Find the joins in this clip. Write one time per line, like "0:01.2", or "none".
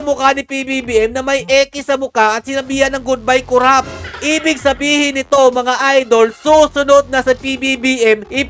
none

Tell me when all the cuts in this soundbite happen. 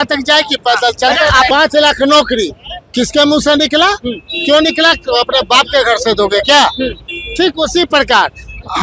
0:01.5

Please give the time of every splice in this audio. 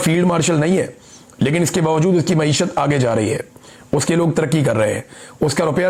none

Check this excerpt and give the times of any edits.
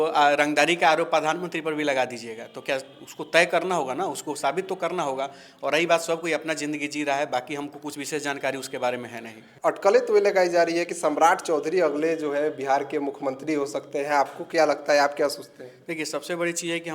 0:09.4

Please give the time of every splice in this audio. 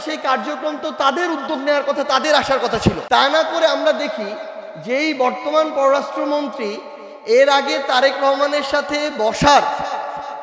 0:03.0

